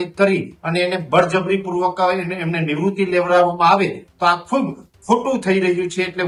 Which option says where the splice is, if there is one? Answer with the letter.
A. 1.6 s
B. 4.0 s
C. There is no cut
C